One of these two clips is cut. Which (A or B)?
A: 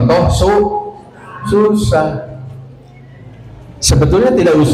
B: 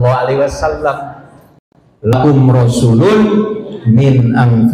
B